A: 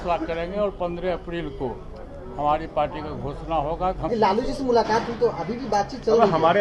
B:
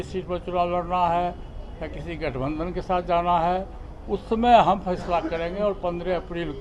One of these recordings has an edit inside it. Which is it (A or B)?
A